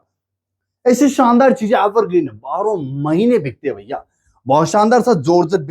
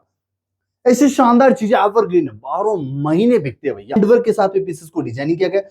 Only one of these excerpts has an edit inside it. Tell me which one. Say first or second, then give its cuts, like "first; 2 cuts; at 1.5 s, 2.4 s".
second; 1 cut; at 4.0 s